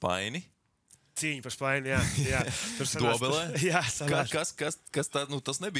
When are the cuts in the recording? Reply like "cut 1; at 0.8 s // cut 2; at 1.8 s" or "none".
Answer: none

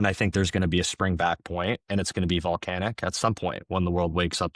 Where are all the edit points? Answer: none

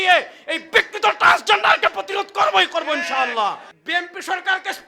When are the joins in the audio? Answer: cut 1; at 3.7 s

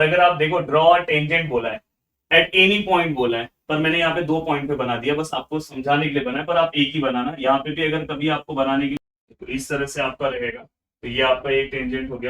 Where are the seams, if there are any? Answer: cut 1; at 9.0 s

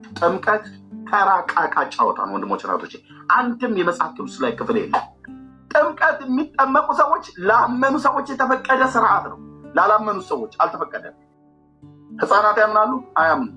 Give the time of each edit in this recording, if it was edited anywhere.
none

